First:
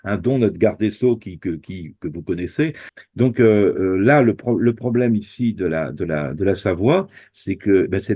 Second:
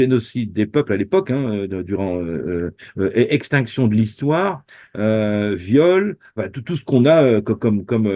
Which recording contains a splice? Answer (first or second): first